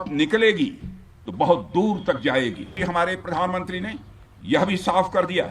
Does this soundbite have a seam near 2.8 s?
yes; 1 cut; at 2.8 s

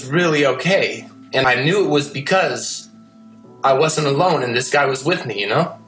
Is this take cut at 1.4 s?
yes; 1 cut; at 1.4 s

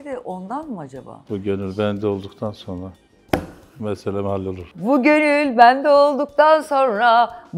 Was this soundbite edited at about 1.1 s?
yes; 1 cut; at 1.1 s

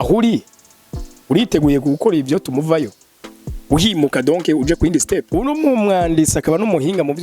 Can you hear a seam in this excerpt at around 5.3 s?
yes; 1 cut; at 5.3 s

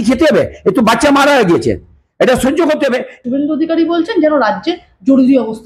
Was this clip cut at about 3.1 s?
yes; 1 cut; at 3.1 s

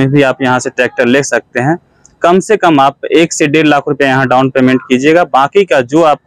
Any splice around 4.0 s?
no; 0 cuts

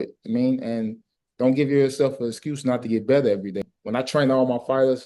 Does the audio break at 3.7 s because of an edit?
yes; 1 cut; at 3.7 s

